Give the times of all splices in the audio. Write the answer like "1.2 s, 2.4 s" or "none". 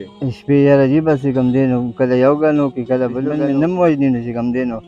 3.4 s